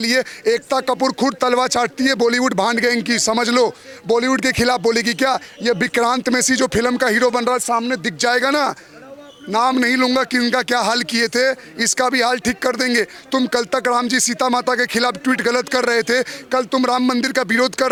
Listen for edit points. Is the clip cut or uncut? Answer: uncut